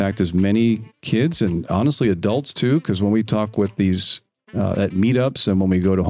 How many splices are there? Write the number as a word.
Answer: zero